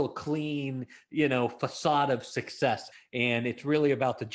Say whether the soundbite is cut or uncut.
cut